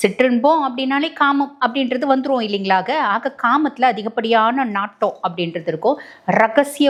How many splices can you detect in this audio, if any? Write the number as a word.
zero